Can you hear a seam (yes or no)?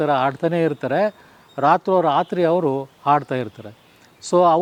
no